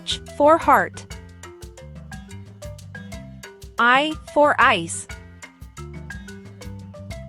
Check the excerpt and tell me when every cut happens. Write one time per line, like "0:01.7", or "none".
0:01.2
0:03.0